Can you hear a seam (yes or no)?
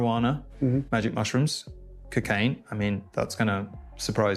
no